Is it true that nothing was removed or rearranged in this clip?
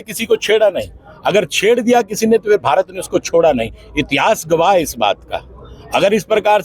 yes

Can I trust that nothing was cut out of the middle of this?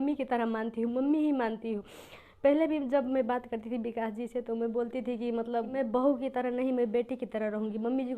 yes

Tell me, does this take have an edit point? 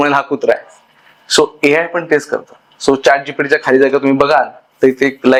no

